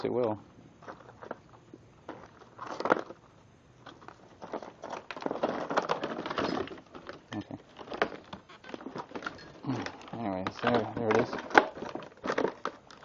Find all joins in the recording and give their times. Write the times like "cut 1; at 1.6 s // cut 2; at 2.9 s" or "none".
cut 1; at 10.1 s